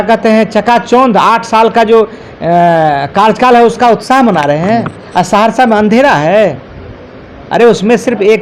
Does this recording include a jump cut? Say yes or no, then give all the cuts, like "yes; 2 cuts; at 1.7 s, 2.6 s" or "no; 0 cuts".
no; 0 cuts